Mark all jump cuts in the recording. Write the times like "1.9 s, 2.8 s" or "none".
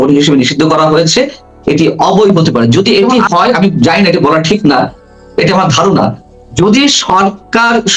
2.3 s